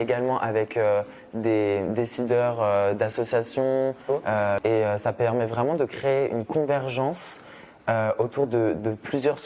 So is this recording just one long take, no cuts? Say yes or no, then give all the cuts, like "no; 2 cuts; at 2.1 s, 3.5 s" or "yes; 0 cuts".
no; 1 cut; at 4.6 s